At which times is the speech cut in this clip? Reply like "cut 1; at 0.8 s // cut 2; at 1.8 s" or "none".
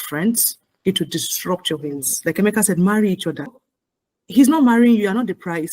cut 1; at 2.1 s // cut 2; at 3.6 s